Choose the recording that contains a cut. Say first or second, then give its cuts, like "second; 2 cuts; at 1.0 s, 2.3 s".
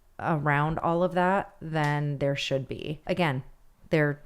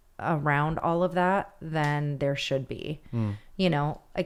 first; 1 cut; at 3.0 s